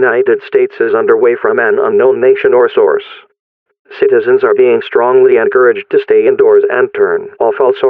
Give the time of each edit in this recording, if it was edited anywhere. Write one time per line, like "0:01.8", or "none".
none